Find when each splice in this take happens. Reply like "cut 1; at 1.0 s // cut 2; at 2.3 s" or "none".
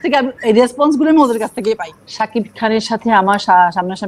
cut 1; at 1.9 s